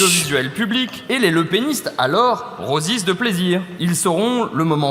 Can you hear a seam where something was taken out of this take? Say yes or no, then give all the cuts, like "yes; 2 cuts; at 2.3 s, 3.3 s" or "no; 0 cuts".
yes; 2 cuts; at 1.0 s, 3.7 s